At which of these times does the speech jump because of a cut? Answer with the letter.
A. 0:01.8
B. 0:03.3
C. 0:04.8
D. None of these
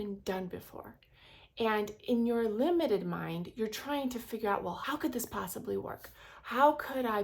C